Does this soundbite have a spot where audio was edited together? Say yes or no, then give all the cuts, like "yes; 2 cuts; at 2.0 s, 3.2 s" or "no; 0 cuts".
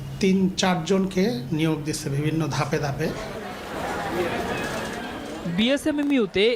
no; 0 cuts